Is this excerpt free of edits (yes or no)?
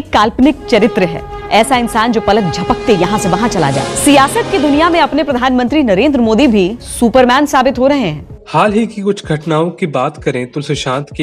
yes